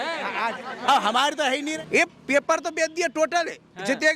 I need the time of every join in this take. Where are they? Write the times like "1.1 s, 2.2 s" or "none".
1.7 s